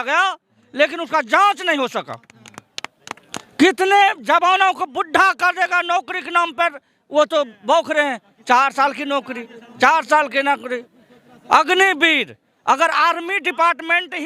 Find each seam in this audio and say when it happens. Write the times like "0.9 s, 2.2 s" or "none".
none